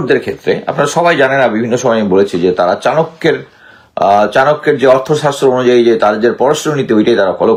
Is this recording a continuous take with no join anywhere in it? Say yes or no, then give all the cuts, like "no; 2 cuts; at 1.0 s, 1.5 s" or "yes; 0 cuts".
yes; 0 cuts